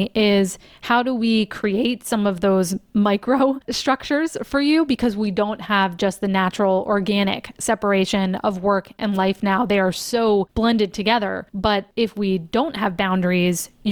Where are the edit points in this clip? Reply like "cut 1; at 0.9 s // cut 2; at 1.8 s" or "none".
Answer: cut 1; at 3.7 s // cut 2; at 10.5 s // cut 3; at 11.7 s